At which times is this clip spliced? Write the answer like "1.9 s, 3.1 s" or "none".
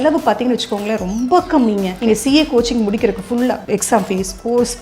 1.9 s, 3.6 s